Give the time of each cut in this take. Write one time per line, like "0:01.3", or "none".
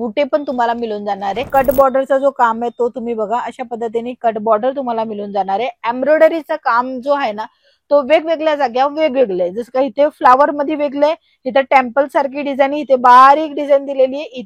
0:01.5